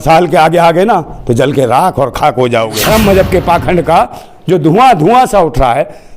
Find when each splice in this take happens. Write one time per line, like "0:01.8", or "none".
0:02.8